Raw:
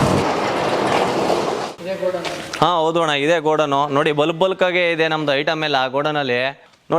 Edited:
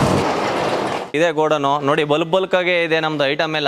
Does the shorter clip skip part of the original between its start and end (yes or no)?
yes